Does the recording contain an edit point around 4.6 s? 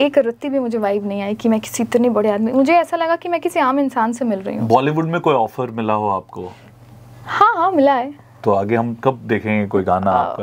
no; 0 cuts

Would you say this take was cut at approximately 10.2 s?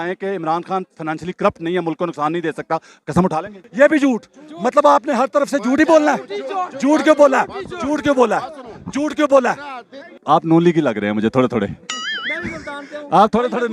yes; 2 cuts; at 3.5 s, 10.2 s

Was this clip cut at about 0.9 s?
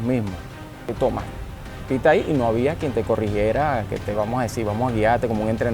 yes; 1 cut; at 0.9 s

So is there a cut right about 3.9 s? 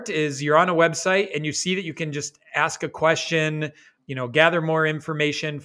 yes; 1 cut; at 3.9 s

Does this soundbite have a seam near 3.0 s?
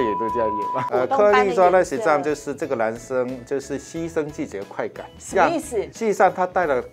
no; 3 cuts; at 0.8 s, 5.1 s, 5.9 s

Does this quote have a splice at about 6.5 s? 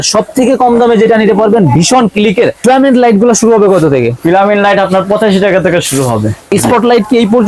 yes; 2 cuts; at 2.0 s, 6.5 s

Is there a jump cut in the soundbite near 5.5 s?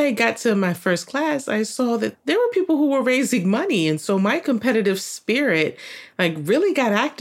no; 0 cuts

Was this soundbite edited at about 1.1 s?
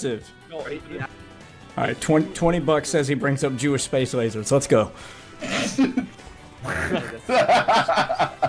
yes; 1 cut; at 1.1 s

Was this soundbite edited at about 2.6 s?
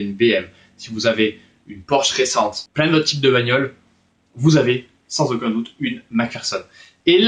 yes; 1 cut; at 2.6 s

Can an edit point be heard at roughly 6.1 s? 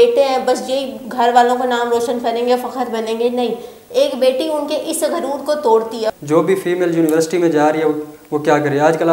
yes; 1 cut; at 6.1 s

